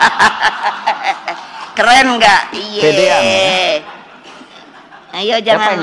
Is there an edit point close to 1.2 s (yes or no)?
no